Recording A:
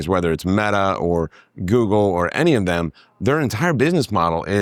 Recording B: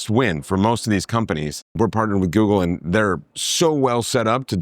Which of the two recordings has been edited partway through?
B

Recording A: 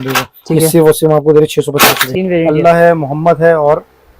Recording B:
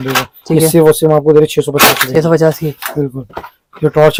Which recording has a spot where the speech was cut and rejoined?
A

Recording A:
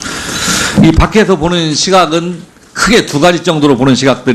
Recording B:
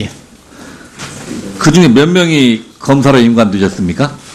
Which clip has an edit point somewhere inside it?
A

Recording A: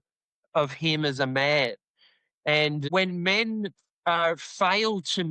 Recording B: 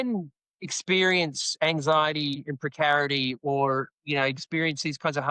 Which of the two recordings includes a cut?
A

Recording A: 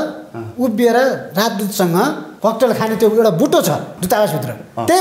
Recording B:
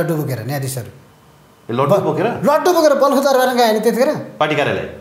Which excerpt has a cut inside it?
A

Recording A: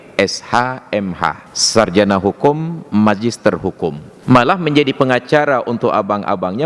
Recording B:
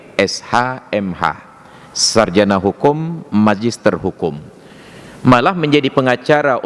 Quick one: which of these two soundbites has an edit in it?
A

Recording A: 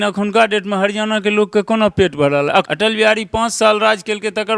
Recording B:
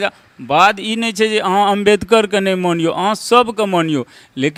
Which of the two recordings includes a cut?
A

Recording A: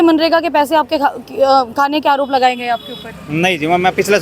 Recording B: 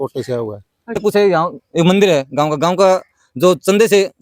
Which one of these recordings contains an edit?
B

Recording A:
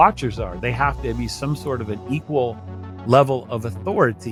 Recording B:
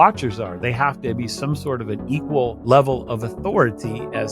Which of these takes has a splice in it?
B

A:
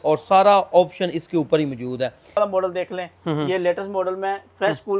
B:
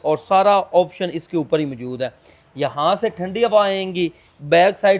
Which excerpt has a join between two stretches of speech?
A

